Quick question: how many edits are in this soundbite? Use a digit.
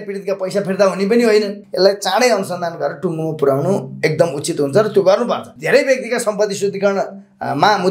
2